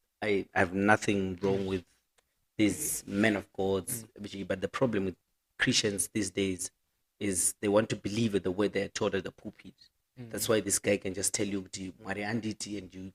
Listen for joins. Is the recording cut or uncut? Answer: uncut